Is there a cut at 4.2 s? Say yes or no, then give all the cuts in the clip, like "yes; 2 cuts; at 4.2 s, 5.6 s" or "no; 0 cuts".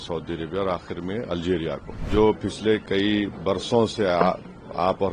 no; 1 cut; at 2.1 s